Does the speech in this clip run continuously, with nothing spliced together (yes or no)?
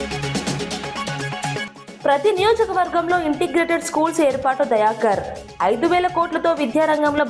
no